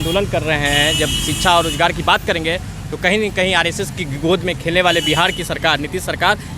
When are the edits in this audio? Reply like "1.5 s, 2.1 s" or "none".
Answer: none